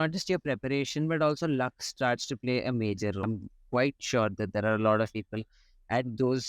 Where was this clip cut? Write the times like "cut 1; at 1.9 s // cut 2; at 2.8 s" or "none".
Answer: cut 1; at 3.2 s

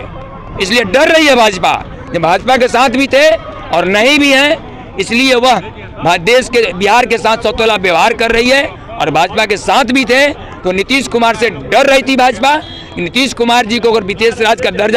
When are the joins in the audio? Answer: none

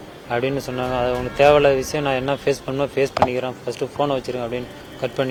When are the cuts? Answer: none

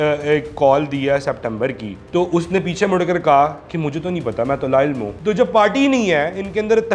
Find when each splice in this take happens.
cut 1; at 5.1 s

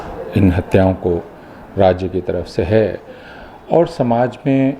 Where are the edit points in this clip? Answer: none

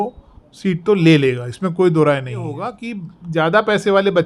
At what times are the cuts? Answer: cut 1; at 2.8 s

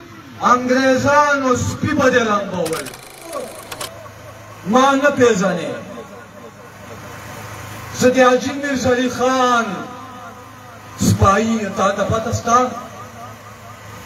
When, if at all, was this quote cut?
cut 1; at 3.5 s

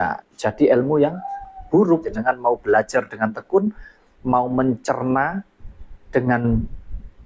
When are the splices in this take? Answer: cut 1; at 2.1 s

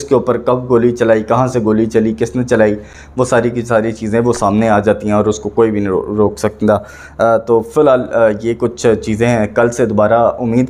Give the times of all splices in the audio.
none

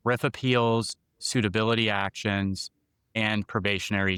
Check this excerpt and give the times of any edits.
none

